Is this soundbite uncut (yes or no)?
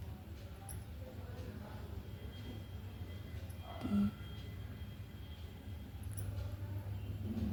yes